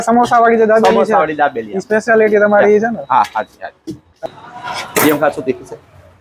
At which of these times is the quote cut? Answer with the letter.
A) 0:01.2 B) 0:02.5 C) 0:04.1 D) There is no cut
C